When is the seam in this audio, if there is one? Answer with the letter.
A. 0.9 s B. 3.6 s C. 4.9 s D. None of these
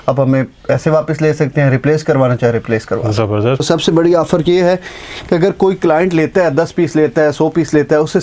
B